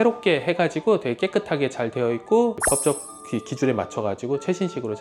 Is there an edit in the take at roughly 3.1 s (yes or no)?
no